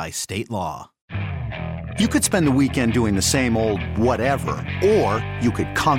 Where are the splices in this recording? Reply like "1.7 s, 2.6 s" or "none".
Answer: 1.0 s